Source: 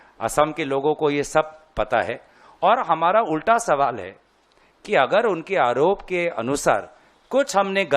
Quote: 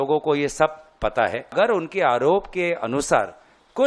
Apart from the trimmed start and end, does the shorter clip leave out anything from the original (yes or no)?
yes